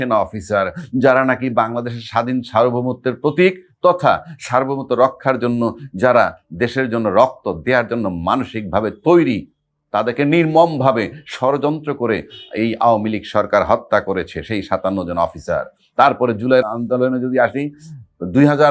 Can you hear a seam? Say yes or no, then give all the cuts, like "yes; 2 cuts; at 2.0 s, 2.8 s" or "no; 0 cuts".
yes; 1 cut; at 16.6 s